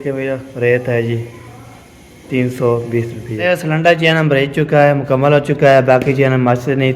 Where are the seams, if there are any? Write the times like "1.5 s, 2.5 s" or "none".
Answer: 3.3 s